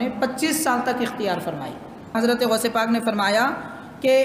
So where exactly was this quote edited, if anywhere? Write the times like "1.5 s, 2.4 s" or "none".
2.1 s